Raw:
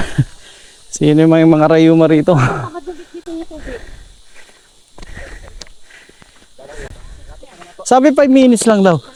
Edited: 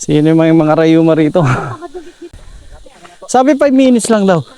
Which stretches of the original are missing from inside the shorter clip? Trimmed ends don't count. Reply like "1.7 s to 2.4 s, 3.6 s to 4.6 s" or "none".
3.2 s to 6.9 s